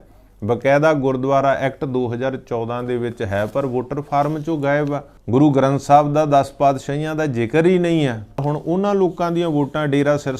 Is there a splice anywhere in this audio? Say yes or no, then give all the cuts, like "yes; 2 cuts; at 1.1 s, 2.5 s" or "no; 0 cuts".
yes; 2 cuts; at 5.1 s, 8.4 s